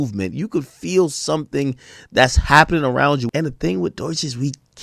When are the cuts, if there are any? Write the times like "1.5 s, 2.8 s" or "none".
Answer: 3.2 s